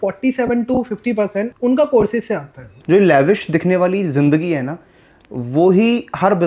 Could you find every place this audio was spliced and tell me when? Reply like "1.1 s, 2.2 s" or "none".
1.5 s, 2.7 s